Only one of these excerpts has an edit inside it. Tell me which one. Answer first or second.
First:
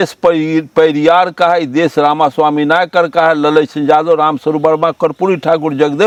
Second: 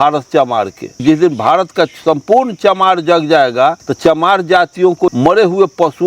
second